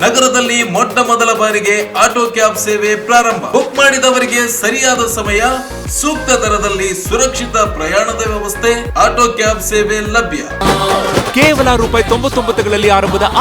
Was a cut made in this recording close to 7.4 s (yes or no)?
no